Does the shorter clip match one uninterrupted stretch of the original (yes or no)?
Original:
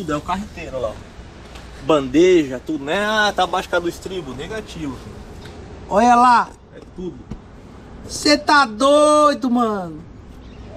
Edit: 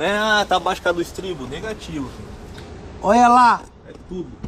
yes